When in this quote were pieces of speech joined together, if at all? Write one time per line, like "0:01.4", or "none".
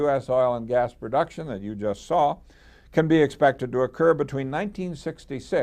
0:04.3